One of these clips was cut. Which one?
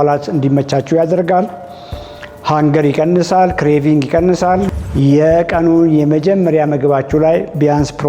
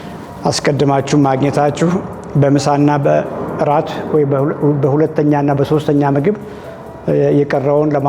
first; 1 cut; at 4.7 s

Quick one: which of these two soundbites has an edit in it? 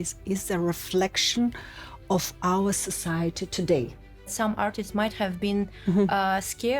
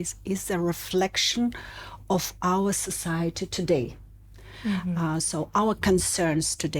first; 1 cut; at 4.3 s

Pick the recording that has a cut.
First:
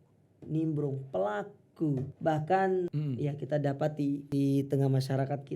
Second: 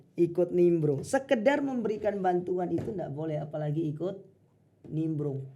first; 3 cuts; at 2.1 s, 3.0 s, 4.2 s

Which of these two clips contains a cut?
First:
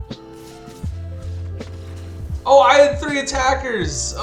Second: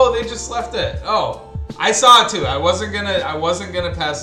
first; 1 cut; at 2.4 s

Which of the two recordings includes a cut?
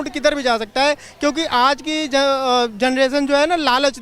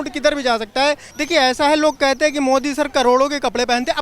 second; 1 cut; at 1.1 s

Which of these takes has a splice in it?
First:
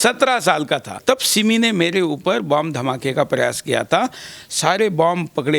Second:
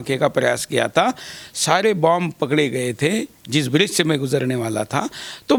first; 1 cut; at 0.9 s

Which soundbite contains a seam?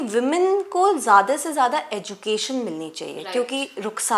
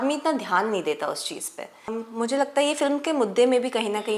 second; 1 cut; at 2.0 s

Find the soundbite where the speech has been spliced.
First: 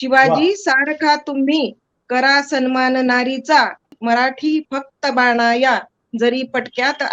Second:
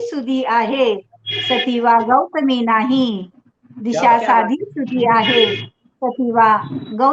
first; 1 cut; at 3.9 s

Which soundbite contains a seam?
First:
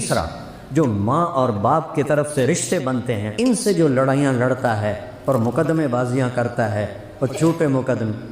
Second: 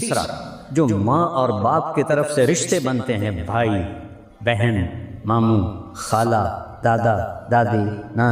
first; 1 cut; at 3.3 s

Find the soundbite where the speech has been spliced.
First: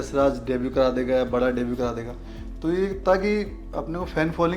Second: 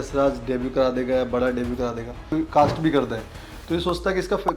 second; 1 cut; at 2.1 s

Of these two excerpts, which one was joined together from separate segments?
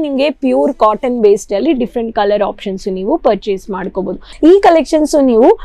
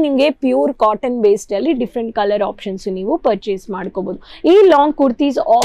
first; 1 cut; at 4.3 s

